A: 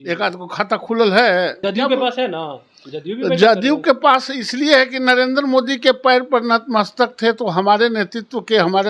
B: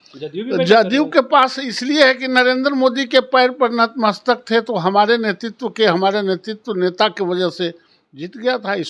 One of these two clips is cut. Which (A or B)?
A